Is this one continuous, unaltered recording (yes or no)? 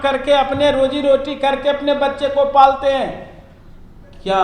yes